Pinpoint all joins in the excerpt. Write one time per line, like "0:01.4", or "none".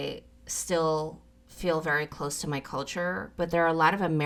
none